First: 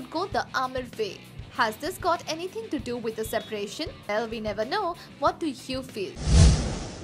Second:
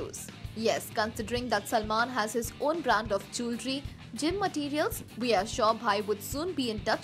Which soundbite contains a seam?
first; 1 cut; at 6.1 s

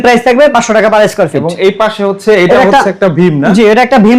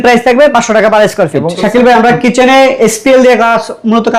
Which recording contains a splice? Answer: second; 1 cut; at 1.5 s

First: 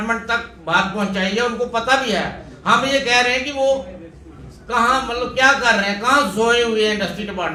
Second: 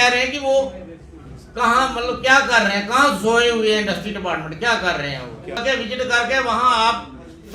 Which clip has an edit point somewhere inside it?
second; 1 cut; at 5.6 s

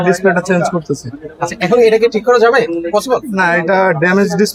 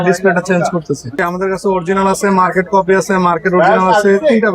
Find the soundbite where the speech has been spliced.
second; 1 cut; at 1.3 s

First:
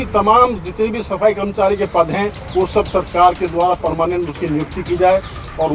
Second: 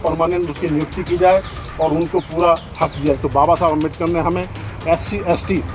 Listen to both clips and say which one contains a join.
second; 1 cut; at 3.2 s

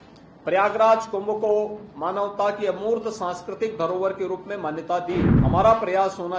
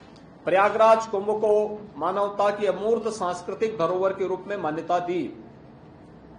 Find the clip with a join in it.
first; 1 cut; at 5.3 s

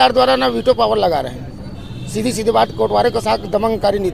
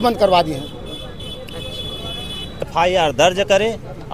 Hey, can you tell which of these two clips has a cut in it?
second; 1 cut; at 2.6 s

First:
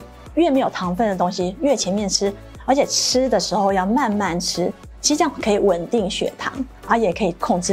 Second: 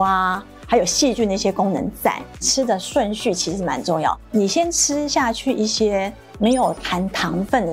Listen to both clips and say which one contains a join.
second; 1 cut; at 2.4 s

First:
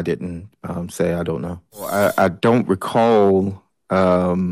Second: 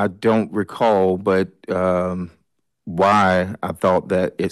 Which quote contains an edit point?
first; 1 cut; at 1.9 s

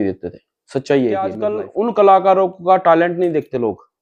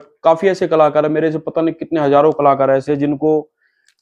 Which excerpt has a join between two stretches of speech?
first; 1 cut; at 1.4 s

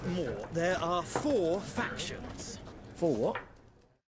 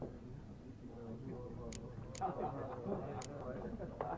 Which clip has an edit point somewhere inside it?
second; 1 cut; at 2.0 s

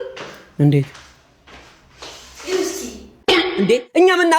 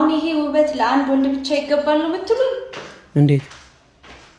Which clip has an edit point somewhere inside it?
first; 1 cut; at 3.1 s

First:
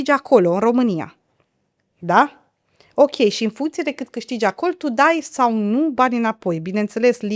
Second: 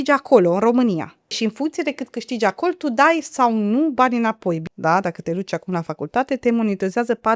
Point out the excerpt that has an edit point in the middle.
second; 2 cuts; at 1.4 s, 4.6 s

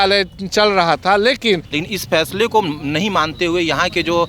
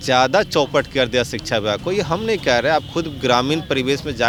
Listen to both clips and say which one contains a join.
first; 1 cut; at 1.7 s

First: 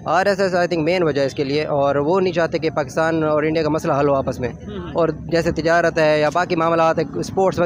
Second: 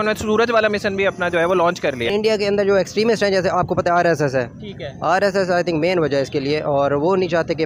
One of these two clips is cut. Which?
second; 1 cut; at 2.1 s

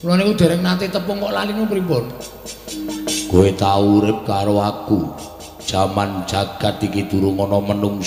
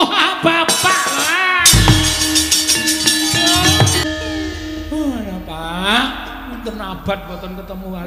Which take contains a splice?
second; 1 cut; at 4.0 s

